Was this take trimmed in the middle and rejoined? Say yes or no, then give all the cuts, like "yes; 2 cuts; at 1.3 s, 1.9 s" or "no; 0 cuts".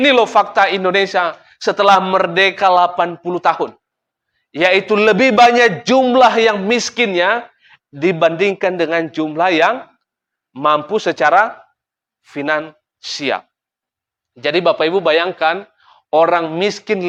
no; 0 cuts